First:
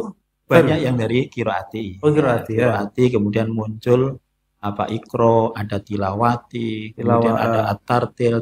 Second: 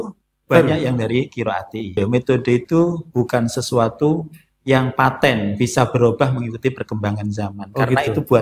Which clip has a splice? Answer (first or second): second